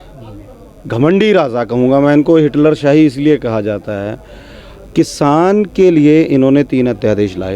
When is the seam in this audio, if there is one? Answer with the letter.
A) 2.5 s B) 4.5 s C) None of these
C